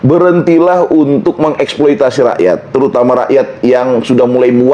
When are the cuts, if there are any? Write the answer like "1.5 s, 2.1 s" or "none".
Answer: none